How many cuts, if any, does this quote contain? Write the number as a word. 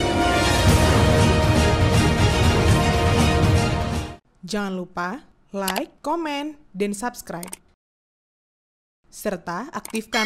one